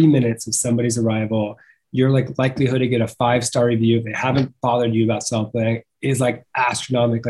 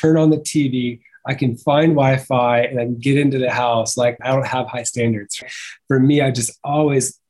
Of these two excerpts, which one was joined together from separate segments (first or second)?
second